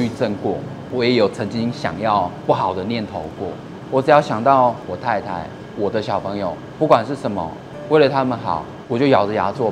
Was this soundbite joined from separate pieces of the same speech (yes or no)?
yes